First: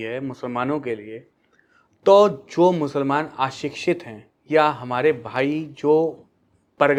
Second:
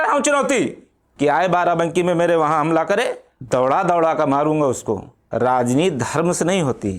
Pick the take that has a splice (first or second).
second